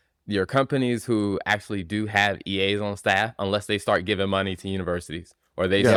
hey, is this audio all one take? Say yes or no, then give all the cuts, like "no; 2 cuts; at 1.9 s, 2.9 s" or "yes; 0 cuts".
yes; 0 cuts